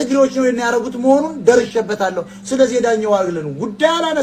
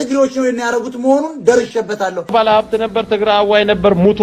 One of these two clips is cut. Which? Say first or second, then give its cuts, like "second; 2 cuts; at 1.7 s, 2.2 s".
second; 1 cut; at 2.3 s